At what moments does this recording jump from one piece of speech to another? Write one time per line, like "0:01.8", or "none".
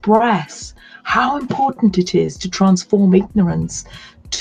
none